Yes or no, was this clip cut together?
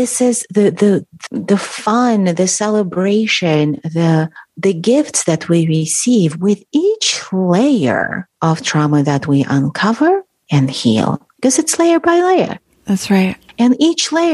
yes